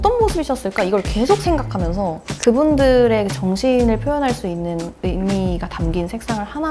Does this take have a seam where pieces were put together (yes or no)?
yes